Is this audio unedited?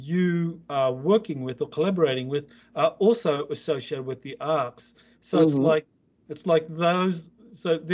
yes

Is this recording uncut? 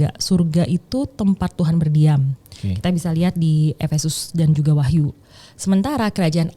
yes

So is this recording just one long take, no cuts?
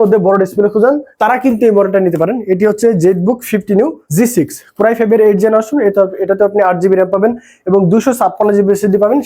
no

